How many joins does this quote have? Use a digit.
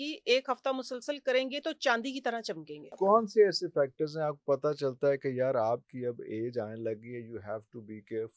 1